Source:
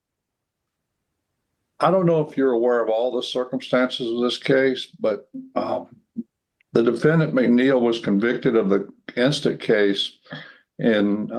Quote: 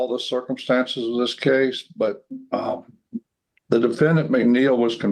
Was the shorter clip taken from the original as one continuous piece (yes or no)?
yes